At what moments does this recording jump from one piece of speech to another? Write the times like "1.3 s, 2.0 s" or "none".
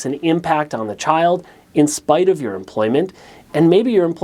none